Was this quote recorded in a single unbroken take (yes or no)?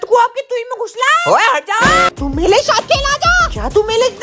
no